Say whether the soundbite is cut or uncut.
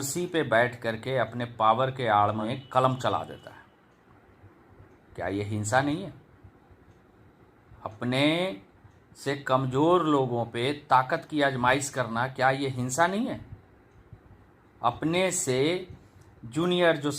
cut